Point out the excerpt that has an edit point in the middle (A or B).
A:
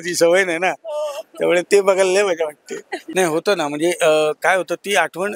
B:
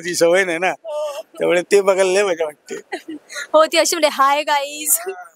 A